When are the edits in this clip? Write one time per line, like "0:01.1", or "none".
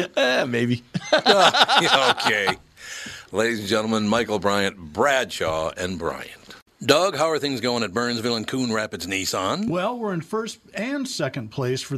0:06.6